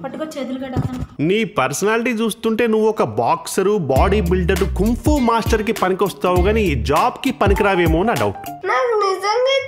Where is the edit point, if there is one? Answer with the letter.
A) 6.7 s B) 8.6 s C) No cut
B